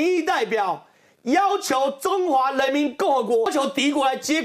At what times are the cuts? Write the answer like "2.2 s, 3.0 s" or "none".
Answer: 3.5 s

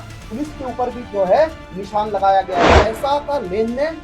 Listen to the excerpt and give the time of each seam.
2.7 s

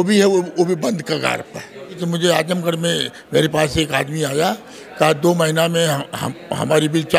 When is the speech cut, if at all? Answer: 2.0 s

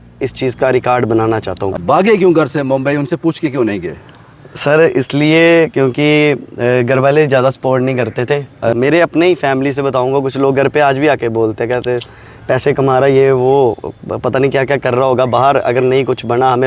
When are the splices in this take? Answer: 1.7 s, 8.7 s

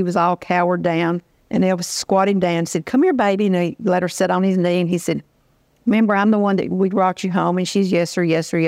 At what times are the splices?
1.3 s

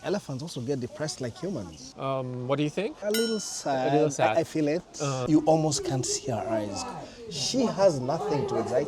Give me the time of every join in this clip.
1.8 s, 5.2 s

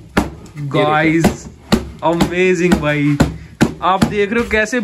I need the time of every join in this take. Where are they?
none

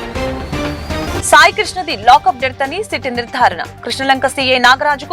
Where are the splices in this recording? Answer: 1.0 s

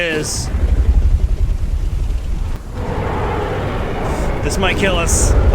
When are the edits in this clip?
2.6 s

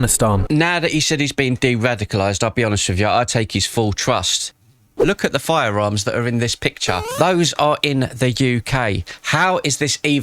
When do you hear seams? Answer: 5.0 s

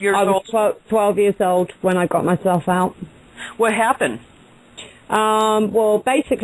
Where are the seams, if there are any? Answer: 4.9 s

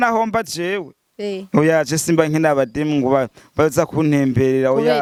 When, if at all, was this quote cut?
none

